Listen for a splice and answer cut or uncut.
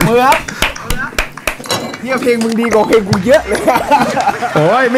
uncut